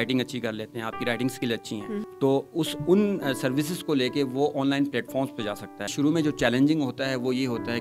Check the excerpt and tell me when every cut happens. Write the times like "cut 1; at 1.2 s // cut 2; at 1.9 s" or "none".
cut 1; at 2.1 s // cut 2; at 5.9 s